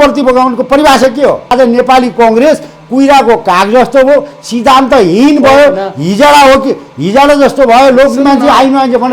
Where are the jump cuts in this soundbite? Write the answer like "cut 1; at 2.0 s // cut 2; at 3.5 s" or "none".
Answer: cut 1; at 1.5 s